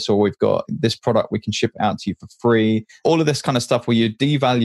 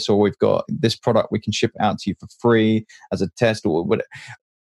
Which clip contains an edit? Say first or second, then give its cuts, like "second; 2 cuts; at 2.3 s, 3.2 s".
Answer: first; 1 cut; at 2.9 s